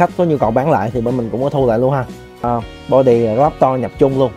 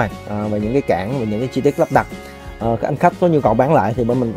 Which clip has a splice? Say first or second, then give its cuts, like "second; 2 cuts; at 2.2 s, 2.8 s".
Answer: first; 1 cut; at 2.4 s